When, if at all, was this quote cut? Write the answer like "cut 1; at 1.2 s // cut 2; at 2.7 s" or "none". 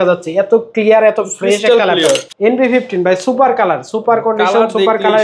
cut 1; at 2.3 s